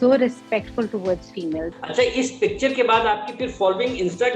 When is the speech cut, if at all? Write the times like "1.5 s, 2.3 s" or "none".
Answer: 1.8 s

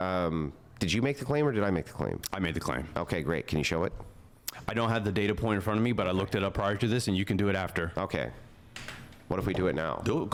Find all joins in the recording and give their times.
none

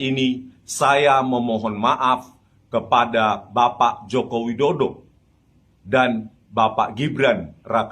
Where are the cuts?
none

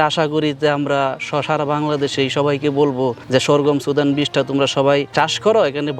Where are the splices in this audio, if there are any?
none

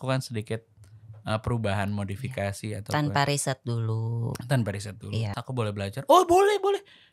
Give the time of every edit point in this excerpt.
5.4 s

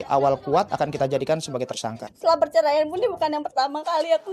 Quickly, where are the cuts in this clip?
2.1 s

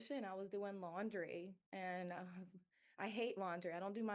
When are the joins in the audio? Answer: none

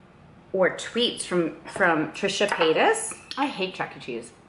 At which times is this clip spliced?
3.2 s

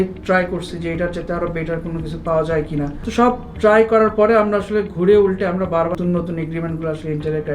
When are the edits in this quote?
3.0 s, 5.9 s

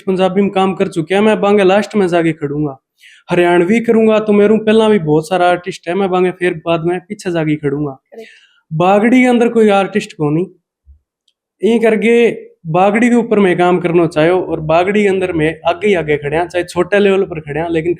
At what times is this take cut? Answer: none

